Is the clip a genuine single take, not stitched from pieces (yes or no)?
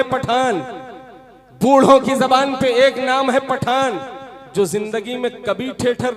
yes